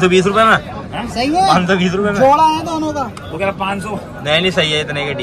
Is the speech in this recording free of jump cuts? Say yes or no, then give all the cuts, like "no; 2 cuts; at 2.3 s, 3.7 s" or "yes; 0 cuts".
yes; 0 cuts